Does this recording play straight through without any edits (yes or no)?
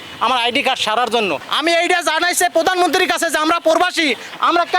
no